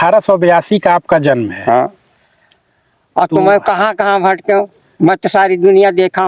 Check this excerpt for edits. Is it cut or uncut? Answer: uncut